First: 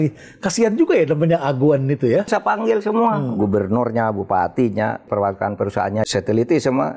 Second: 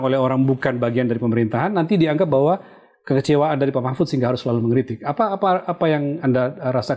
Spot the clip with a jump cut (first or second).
first